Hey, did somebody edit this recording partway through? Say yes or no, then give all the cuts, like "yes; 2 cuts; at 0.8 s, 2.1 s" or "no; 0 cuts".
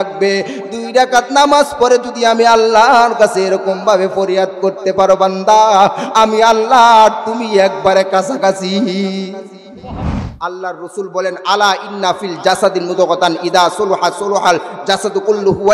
yes; 1 cut; at 10.0 s